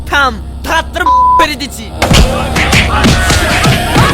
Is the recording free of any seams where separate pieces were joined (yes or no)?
yes